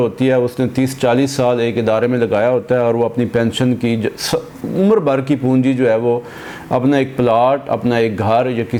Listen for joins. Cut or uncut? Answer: uncut